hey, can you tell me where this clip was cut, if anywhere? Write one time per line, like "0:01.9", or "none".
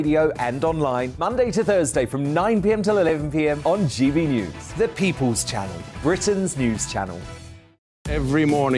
0:07.9